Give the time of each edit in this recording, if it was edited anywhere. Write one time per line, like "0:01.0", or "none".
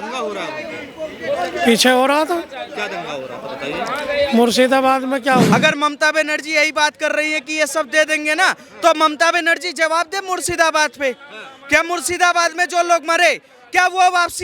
0:05.5